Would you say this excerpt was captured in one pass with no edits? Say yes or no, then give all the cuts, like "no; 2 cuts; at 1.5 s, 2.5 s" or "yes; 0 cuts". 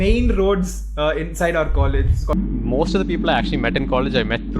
no; 1 cut; at 2.3 s